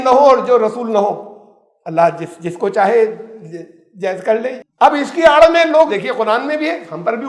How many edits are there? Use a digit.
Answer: 2